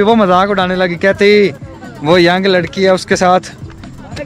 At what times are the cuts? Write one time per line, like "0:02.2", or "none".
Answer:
none